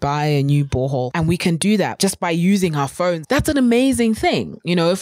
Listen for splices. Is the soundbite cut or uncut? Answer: cut